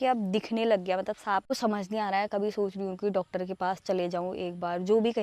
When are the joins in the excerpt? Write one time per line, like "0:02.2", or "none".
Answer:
0:01.5